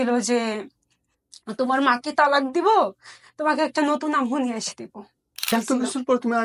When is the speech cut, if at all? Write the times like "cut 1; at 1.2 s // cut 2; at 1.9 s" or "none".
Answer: cut 1; at 5.5 s